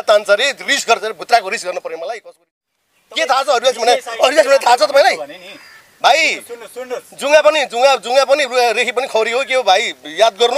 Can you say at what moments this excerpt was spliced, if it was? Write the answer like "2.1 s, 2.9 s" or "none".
2.6 s